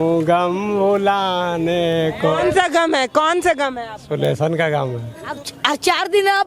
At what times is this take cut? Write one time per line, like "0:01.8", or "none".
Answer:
0:05.4